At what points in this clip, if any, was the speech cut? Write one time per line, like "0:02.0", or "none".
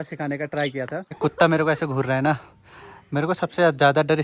0:01.2